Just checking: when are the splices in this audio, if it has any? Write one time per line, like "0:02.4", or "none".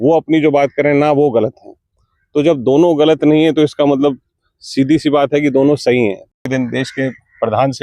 0:06.4